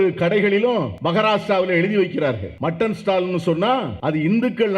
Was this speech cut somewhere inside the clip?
yes; 3 cuts; at 1.0 s, 2.5 s, 3.9 s

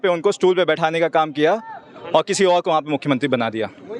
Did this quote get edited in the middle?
no; 0 cuts

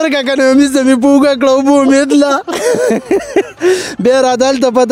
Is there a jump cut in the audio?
no; 0 cuts

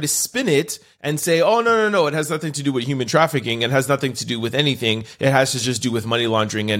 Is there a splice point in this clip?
no; 0 cuts

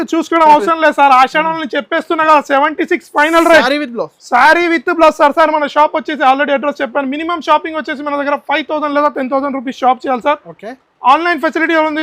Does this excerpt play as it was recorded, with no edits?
yes; 0 cuts

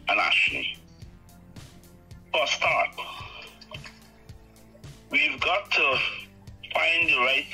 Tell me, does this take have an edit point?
no; 0 cuts

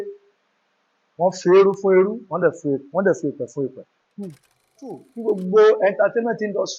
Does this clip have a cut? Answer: yes; 1 cut; at 5.1 s

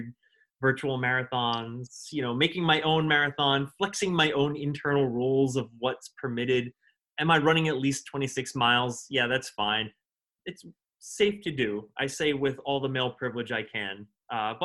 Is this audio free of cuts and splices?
no; 1 cut; at 10.1 s

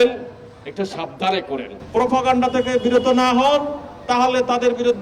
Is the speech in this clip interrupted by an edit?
yes; 1 cut; at 1.8 s

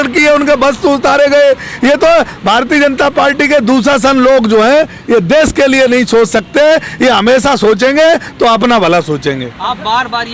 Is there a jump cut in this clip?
no; 0 cuts

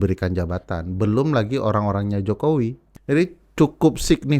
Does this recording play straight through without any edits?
no; 1 cut; at 2.9 s

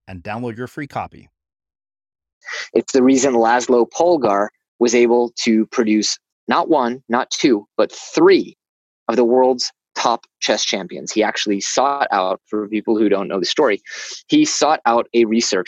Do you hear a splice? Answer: yes; 1 cut; at 2.5 s

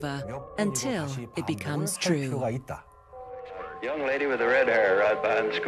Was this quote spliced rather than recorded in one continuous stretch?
yes; 1 cut; at 2.0 s

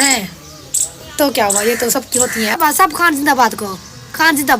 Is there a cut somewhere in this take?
yes; 1 cut; at 2.6 s

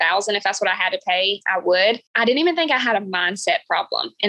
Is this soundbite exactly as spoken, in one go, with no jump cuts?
yes; 0 cuts

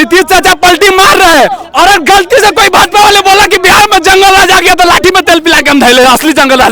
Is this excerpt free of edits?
yes; 0 cuts

